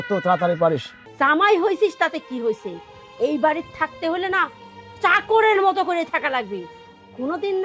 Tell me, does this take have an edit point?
yes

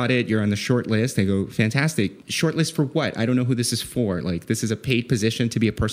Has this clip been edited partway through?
yes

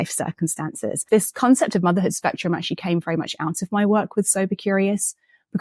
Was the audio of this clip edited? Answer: yes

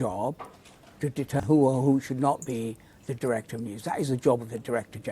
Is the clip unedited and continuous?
no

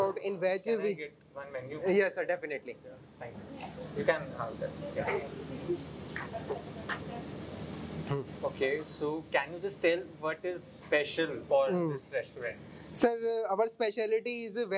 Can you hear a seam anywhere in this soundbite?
no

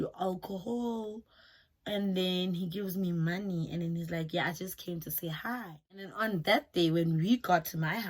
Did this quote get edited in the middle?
yes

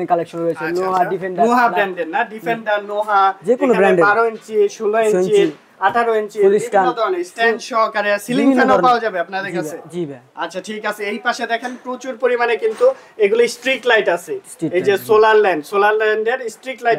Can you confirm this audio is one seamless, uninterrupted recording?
yes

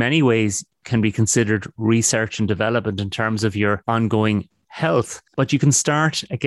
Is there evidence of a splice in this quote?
no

